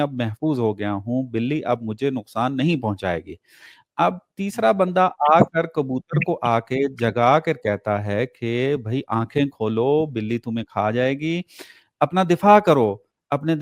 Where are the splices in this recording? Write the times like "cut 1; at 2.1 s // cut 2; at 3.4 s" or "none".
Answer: none